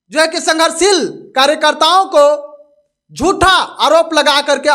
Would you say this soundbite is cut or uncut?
uncut